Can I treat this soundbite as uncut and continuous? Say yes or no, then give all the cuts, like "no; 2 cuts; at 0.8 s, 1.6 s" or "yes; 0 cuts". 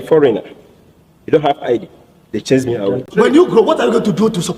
yes; 0 cuts